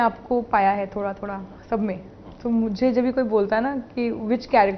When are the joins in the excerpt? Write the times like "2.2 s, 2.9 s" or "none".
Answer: none